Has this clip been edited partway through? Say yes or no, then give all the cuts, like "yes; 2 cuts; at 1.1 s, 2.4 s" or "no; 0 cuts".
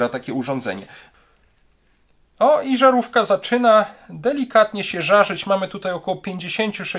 yes; 1 cut; at 1.0 s